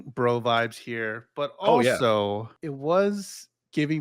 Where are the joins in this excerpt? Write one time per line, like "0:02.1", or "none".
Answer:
0:02.6